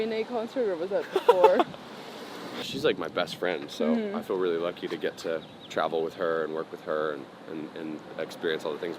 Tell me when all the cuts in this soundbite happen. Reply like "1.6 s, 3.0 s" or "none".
2.7 s